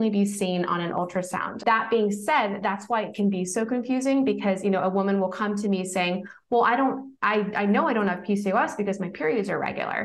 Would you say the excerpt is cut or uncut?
cut